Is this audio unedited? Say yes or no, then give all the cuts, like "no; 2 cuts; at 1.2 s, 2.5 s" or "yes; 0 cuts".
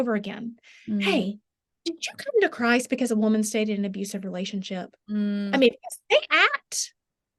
yes; 0 cuts